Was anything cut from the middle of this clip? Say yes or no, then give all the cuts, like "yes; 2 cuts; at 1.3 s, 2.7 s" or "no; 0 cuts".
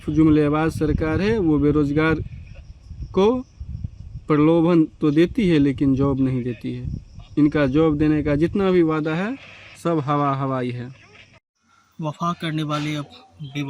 no; 0 cuts